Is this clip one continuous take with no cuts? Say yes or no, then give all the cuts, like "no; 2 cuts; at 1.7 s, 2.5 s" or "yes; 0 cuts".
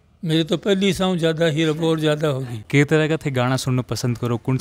no; 1 cut; at 2.5 s